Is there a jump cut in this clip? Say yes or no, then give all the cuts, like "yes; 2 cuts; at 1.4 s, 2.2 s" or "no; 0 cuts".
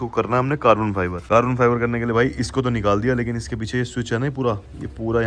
yes; 1 cut; at 1.2 s